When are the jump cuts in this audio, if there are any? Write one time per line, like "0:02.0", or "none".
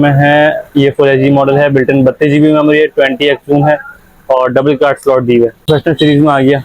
0:05.6